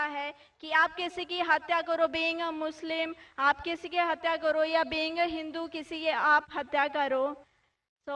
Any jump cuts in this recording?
yes; 1 cut; at 7.1 s

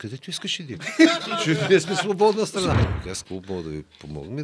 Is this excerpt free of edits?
no; 1 cut; at 2.9 s

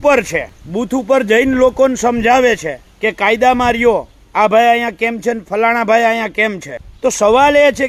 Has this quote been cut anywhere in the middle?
no; 0 cuts

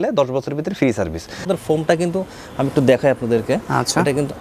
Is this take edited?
yes; 1 cut; at 1.5 s

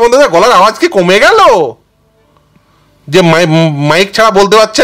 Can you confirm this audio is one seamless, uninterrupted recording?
yes; 0 cuts

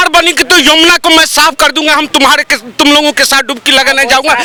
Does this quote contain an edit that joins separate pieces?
no; 0 cuts

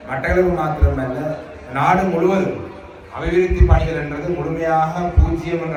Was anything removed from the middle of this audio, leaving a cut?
no; 0 cuts

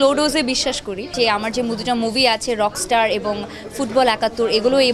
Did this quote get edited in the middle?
yes; 1 cut; at 1.1 s

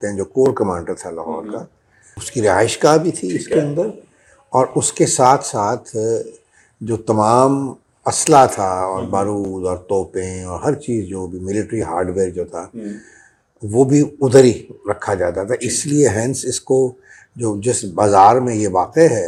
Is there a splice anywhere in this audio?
no; 0 cuts

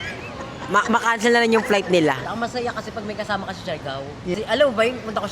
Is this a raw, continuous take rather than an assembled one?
no; 2 cuts; at 2.2 s, 4.3 s

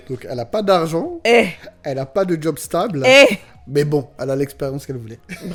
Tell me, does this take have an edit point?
no; 0 cuts

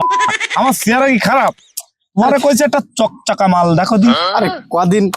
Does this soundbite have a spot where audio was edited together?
no; 0 cuts

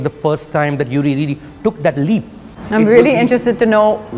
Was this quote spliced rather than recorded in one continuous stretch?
no; 0 cuts

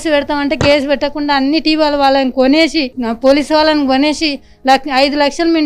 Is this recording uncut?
yes; 0 cuts

